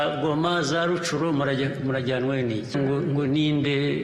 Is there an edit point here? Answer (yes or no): yes